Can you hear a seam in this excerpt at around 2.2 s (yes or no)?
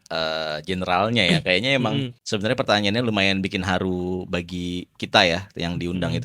yes